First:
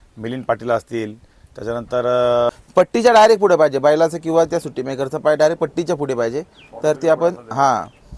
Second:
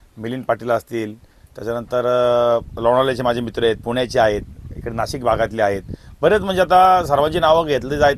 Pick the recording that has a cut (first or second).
first